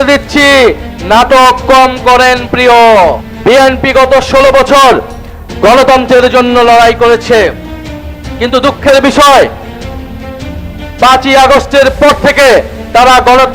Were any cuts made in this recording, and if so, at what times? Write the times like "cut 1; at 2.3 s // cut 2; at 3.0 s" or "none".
cut 1; at 3.3 s